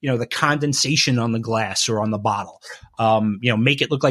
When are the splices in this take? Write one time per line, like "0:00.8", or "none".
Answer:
none